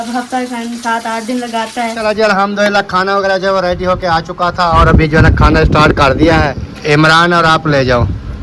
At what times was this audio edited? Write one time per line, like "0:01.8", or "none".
0:02.0
0:06.7